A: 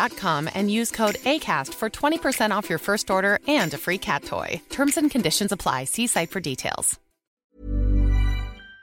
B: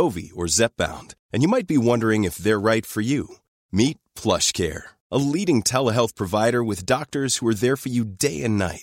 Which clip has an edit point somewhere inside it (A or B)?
A